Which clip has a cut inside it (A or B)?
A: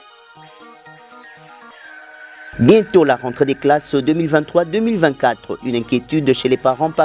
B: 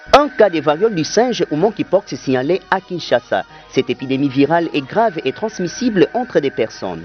A